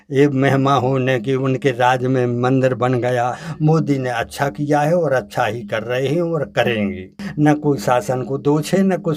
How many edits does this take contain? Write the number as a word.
two